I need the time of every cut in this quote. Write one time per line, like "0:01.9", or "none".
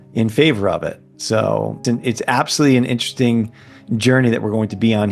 0:01.8